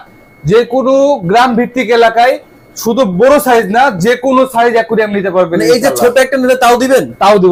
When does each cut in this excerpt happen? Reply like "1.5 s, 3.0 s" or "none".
none